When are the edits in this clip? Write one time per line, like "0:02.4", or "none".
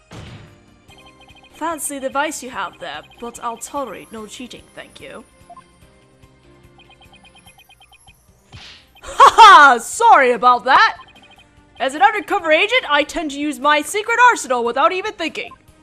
none